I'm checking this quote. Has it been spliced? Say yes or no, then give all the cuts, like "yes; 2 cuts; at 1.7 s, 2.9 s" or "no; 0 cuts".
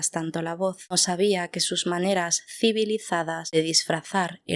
yes; 2 cuts; at 1.0 s, 3.5 s